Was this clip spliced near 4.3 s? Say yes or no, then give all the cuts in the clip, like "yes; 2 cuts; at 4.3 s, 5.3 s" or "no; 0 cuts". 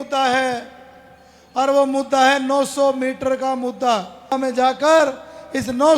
yes; 1 cut; at 4.3 s